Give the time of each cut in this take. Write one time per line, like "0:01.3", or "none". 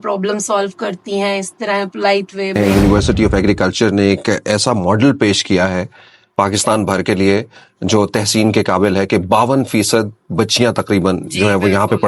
0:02.6